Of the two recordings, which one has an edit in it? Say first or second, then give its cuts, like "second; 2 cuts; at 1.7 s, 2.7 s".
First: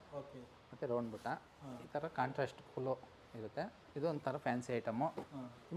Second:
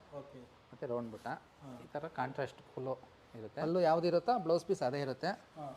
second; 1 cut; at 3.5 s